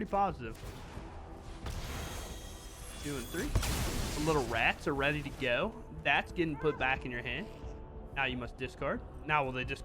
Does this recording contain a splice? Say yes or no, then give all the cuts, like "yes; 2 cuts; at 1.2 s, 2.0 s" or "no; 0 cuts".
no; 0 cuts